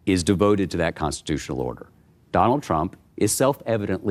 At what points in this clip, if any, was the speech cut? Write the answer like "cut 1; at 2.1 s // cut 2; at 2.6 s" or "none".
none